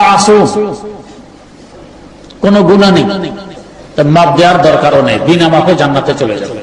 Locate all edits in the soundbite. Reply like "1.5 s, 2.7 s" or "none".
1.8 s